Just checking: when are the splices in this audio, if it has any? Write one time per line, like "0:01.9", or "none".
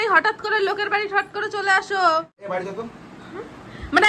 0:02.4